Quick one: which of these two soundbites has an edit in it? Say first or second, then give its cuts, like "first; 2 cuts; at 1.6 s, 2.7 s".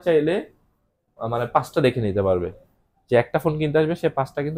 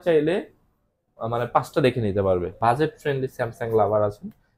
second; 1 cut; at 2.6 s